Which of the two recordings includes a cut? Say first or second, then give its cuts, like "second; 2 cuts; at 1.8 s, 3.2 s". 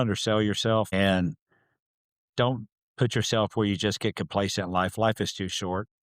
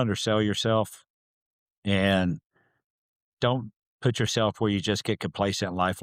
first; 1 cut; at 0.9 s